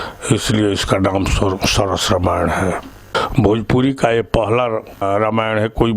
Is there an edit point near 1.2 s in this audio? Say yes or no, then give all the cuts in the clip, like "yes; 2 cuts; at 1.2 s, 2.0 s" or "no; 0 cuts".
no; 2 cuts; at 3.1 s, 5.0 s